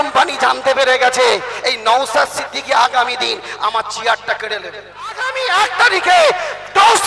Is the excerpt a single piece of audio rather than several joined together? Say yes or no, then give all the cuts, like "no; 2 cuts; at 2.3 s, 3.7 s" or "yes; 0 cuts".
no; 1 cut; at 5.4 s